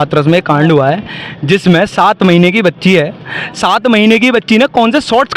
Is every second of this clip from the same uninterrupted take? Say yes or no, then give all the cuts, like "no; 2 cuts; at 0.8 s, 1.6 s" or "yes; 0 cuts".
yes; 0 cuts